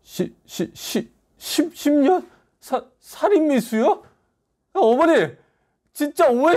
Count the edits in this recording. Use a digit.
0